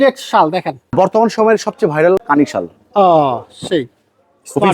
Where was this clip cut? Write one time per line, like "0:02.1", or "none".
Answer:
0:00.9
0:02.2